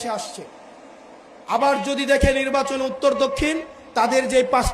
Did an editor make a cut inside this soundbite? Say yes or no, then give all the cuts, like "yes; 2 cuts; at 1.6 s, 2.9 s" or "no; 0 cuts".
no; 0 cuts